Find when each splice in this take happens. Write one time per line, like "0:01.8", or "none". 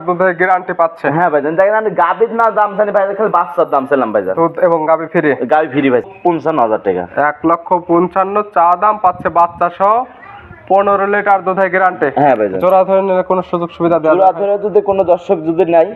0:06.0